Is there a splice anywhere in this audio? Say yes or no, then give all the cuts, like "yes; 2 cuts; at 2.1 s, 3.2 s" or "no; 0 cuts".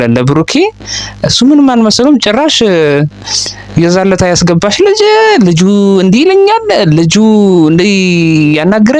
no; 0 cuts